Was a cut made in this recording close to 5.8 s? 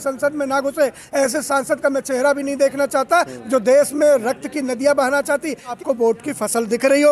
yes; 2 cuts; at 1.1 s, 5.8 s

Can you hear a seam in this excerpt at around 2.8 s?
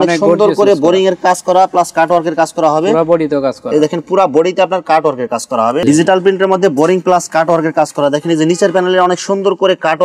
no; 1 cut; at 5.8 s

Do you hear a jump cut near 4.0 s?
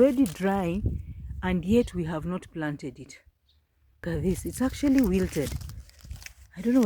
yes; 1 cut; at 4.0 s

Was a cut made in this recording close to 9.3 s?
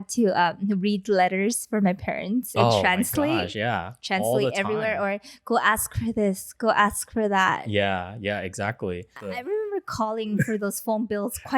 yes; 1 cut; at 9.3 s

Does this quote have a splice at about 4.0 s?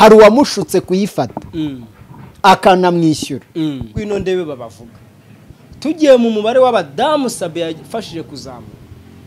yes; 1 cut; at 4.0 s

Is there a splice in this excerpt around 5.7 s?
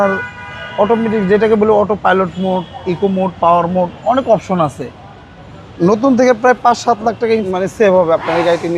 yes; 2 cuts; at 5.7 s, 7.5 s

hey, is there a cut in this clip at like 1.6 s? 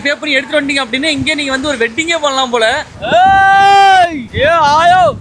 no; 2 cuts; at 2.9 s, 4.2 s

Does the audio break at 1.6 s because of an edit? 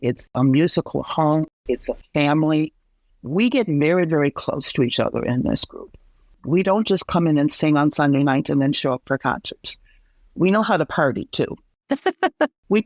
no; 0 cuts

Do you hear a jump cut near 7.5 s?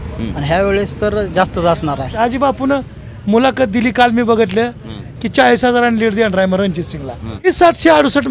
yes; 2 cuts; at 2.2 s, 7.5 s

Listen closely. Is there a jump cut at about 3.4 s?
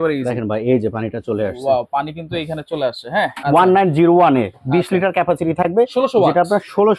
yes; 1 cut; at 3.4 s

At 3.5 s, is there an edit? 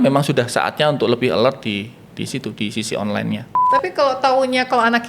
yes; 1 cut; at 3.5 s

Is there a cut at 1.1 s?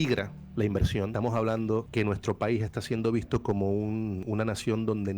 yes; 3 cuts; at 1.1 s, 1.9 s, 4.2 s

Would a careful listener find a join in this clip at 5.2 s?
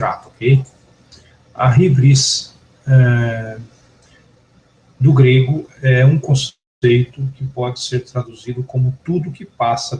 yes; 1 cut; at 5.2 s

